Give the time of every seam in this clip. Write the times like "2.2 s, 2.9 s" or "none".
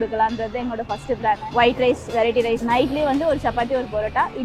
1.4 s, 2.6 s